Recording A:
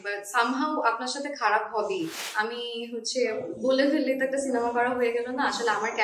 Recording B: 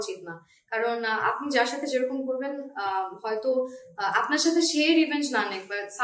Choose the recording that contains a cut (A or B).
A